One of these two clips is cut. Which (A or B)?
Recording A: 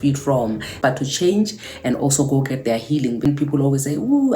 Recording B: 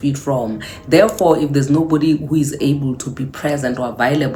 A